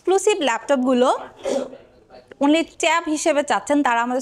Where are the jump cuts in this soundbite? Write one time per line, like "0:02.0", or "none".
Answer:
none

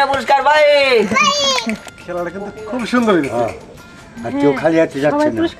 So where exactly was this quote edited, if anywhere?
0:01.9

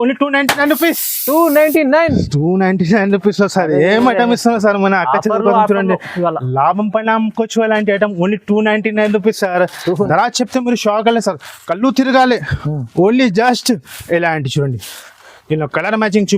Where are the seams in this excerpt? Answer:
0:09.8
0:13.9

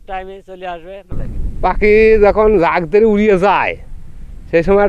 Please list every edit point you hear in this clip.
0:01.2

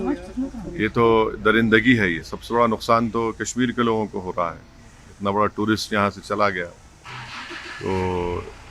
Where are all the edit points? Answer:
0:02.3

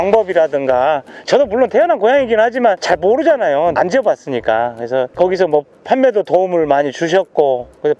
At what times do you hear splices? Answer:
none

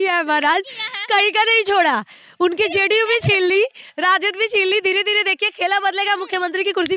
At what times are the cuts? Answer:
none

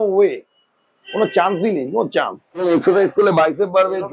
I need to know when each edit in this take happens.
0:02.6

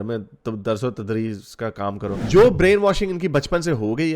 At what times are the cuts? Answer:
0:02.2

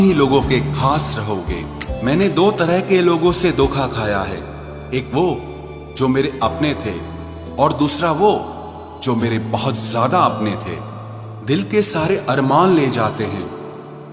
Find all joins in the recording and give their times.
0:01.8

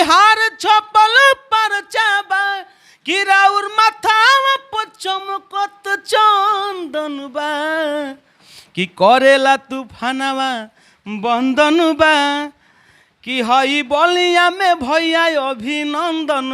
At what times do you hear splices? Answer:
none

